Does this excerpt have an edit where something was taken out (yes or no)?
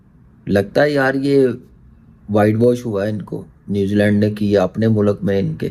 no